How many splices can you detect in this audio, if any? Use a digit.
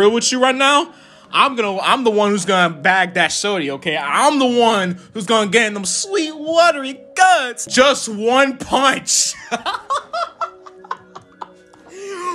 1